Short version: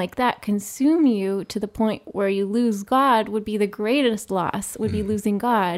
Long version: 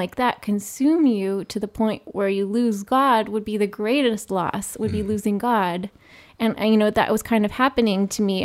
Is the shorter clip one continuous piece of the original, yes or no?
yes